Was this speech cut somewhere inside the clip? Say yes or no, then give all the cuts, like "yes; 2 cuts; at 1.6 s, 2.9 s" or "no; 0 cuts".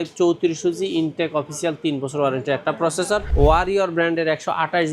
yes; 1 cut; at 3.3 s